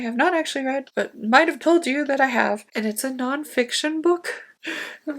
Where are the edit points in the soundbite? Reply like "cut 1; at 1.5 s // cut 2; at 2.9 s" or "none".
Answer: cut 1; at 2.7 s